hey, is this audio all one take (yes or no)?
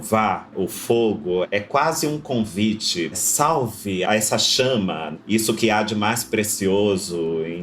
no